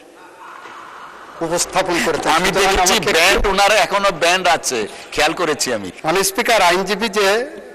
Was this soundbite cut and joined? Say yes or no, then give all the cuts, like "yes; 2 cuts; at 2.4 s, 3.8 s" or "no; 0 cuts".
yes; 1 cut; at 5.9 s